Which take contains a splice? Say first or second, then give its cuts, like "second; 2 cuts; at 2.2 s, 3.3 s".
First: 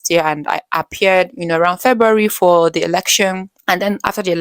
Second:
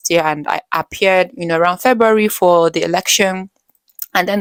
first; 1 cut; at 3.5 s